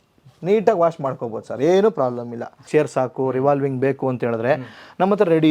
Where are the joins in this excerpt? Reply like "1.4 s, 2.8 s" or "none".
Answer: 2.6 s

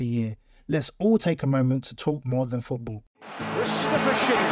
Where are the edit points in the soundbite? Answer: 3.3 s

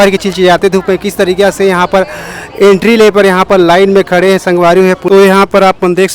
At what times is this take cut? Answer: 5.0 s

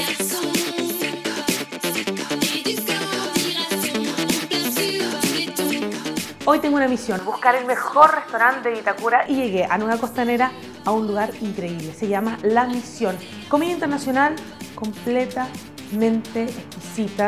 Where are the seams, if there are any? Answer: none

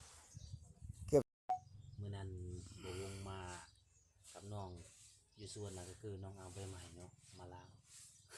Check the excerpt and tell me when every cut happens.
1.3 s

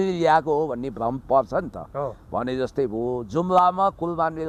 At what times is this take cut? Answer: none

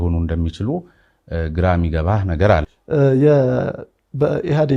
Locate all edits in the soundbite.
2.7 s

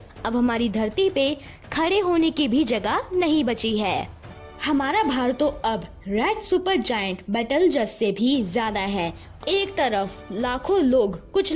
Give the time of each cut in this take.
4.2 s, 9.4 s

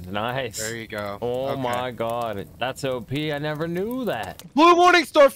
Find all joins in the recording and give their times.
4.4 s

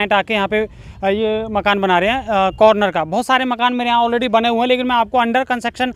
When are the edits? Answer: none

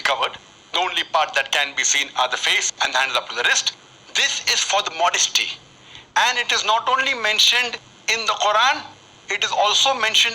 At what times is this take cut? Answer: 4.8 s

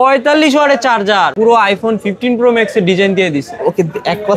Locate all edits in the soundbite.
1.3 s

